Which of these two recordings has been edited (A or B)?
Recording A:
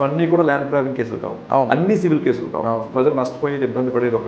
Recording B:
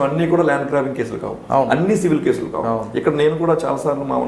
A